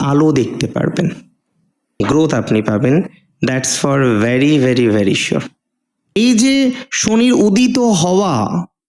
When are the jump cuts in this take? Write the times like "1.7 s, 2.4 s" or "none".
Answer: 1.8 s, 6.2 s